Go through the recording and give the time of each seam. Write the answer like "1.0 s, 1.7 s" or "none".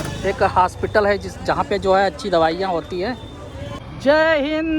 3.7 s